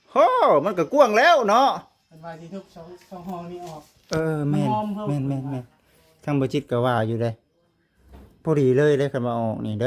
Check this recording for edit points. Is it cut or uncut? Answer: uncut